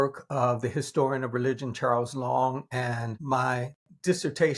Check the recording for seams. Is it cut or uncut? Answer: cut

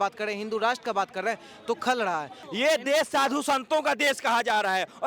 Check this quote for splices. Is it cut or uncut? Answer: cut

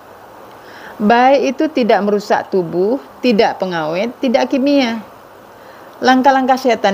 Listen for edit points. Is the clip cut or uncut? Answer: uncut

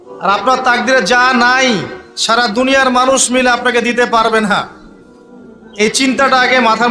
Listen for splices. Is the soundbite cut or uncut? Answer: uncut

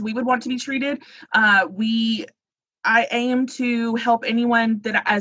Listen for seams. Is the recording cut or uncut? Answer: uncut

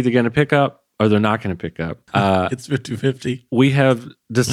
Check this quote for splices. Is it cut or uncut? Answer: cut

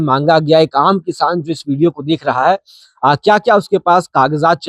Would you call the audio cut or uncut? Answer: uncut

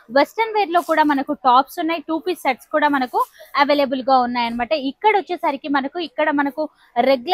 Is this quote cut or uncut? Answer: uncut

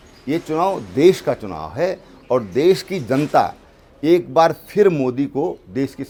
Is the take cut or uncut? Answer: uncut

